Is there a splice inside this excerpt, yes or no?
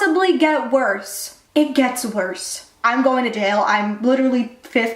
yes